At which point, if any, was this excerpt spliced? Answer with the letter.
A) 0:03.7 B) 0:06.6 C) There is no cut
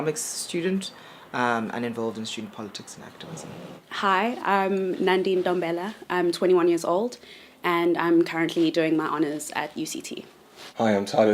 B